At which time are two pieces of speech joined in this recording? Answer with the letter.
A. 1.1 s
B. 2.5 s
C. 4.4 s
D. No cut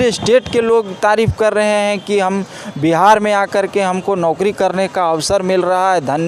D